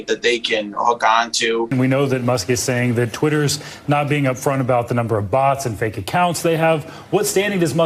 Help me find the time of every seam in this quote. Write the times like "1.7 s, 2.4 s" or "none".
1.7 s